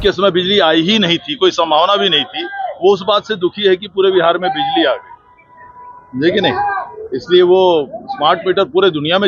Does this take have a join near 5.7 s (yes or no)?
no